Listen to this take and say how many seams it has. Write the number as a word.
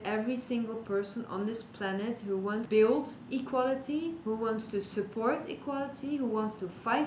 one